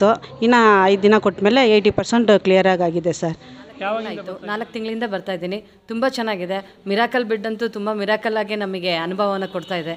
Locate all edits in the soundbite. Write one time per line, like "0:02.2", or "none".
0:04.3

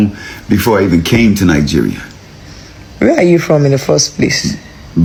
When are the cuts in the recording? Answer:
none

